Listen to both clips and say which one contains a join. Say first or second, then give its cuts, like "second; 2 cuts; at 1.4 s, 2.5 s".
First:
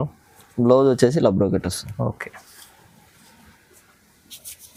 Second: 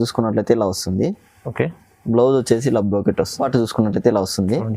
second; 1 cut; at 3.4 s